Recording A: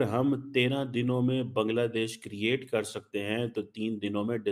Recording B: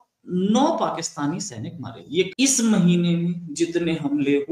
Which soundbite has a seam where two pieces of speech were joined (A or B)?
B